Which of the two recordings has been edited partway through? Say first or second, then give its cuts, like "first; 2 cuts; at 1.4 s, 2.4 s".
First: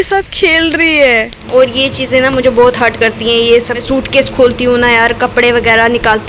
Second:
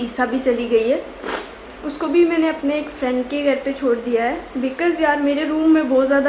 first; 2 cuts; at 1.3 s, 3.8 s